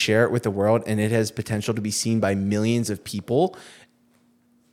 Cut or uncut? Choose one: uncut